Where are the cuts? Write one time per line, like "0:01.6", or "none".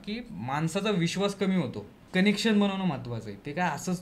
0:02.0